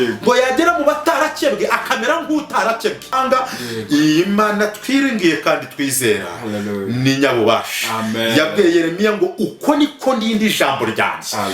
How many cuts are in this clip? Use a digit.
1